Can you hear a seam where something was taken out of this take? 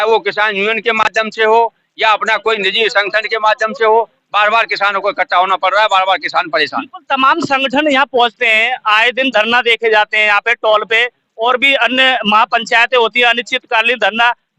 no; 0 cuts

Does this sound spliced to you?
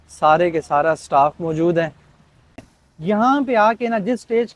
yes; 1 cut; at 2.5 s

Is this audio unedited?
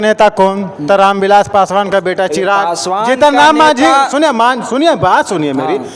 yes; 0 cuts

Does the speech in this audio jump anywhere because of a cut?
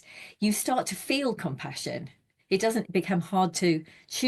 yes; 1 cut; at 2.8 s

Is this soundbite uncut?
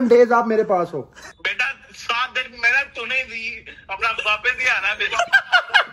no; 1 cut; at 1.2 s

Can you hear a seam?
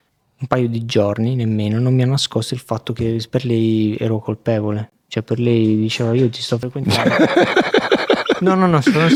no; 0 cuts

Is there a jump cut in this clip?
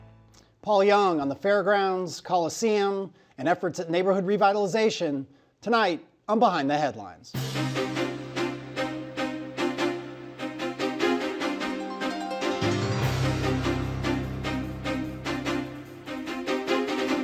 no; 0 cuts

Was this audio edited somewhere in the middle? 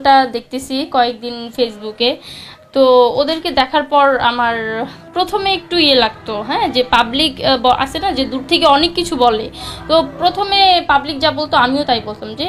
no; 0 cuts

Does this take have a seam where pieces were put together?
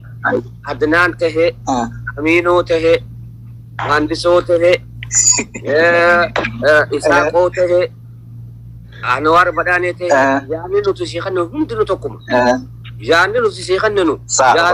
no; 0 cuts

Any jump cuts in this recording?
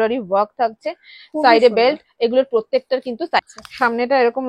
yes; 1 cut; at 3.5 s

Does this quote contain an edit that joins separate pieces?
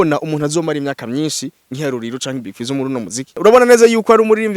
yes; 1 cut; at 3.4 s

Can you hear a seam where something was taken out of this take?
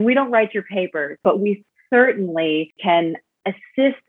yes; 2 cuts; at 1.2 s, 2.8 s

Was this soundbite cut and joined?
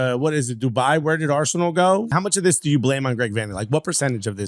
yes; 1 cut; at 2.1 s

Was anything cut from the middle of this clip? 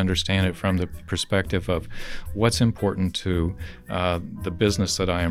no; 0 cuts

